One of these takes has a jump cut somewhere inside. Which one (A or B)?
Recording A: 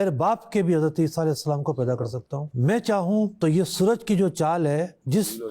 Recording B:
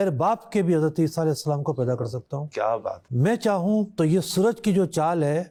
A